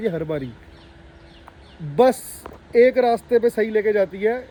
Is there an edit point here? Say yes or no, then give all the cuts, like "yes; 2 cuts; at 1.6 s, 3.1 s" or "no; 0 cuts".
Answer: no; 0 cuts